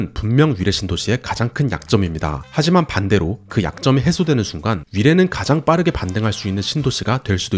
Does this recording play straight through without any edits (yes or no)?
yes